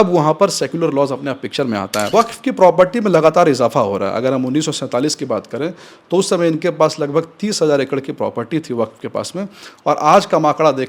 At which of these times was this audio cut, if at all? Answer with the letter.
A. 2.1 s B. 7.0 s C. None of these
A